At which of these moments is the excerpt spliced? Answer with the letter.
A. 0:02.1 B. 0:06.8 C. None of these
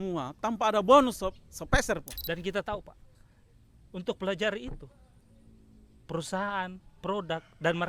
A